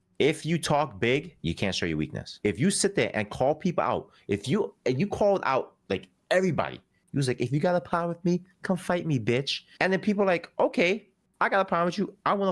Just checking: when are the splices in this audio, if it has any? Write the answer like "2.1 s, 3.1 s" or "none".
1.4 s, 2.4 s, 9.6 s